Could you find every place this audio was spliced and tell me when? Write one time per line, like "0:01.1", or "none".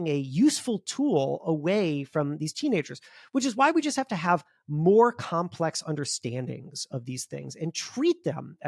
none